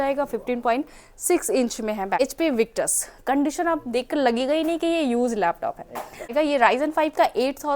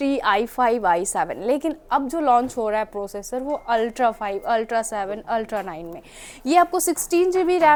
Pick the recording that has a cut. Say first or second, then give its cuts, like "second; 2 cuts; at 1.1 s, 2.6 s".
first; 2 cuts; at 2.2 s, 6.3 s